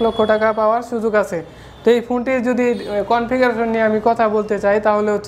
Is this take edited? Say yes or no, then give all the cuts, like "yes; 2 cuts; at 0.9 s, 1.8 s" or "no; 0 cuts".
no; 0 cuts